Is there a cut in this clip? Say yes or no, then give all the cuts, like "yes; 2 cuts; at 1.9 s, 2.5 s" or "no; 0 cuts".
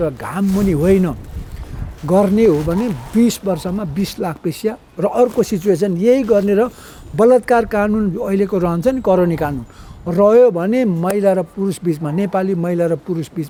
no; 0 cuts